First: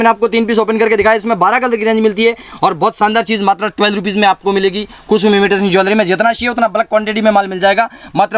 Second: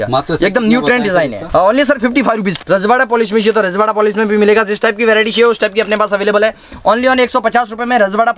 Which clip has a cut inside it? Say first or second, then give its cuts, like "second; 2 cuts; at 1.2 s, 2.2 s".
second; 2 cuts; at 1.4 s, 2.5 s